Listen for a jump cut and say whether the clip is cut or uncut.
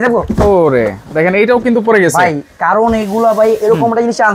uncut